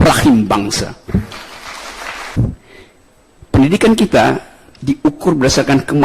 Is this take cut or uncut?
cut